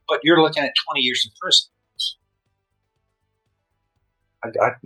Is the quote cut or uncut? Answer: uncut